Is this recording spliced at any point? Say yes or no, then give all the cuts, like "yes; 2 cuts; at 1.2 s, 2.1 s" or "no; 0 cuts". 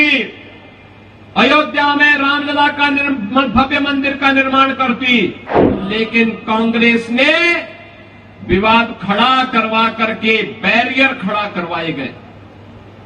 yes; 1 cut; at 5.8 s